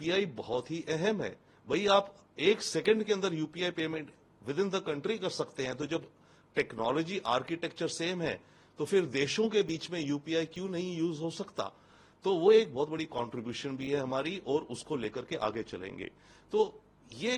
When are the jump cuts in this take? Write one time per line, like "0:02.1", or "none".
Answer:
none